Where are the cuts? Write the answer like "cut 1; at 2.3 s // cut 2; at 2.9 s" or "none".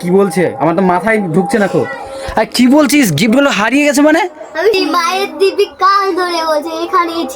cut 1; at 4.8 s